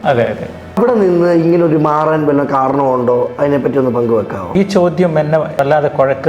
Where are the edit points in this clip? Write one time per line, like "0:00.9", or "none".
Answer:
0:00.8
0:04.5
0:05.6